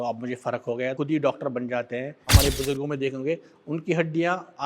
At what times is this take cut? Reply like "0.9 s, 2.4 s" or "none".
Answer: 0.9 s, 2.3 s